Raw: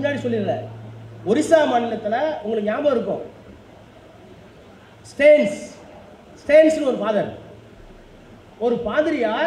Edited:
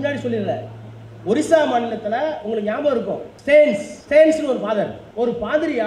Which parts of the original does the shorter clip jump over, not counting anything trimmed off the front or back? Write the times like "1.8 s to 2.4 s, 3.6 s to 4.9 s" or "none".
3.3 s to 5.0 s, 5.6 s to 6.3 s, 7.4 s to 8.5 s